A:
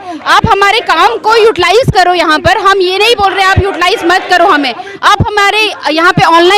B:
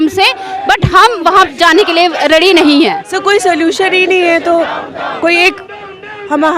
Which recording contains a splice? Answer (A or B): B